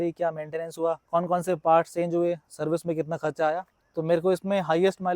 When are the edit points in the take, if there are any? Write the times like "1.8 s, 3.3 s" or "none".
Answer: 1.0 s, 3.7 s